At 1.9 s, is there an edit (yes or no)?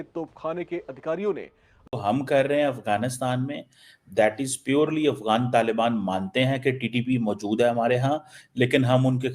yes